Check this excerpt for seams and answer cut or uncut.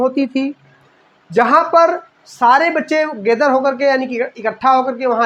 uncut